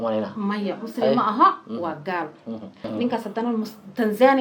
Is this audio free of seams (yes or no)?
no